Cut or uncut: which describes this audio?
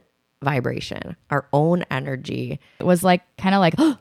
cut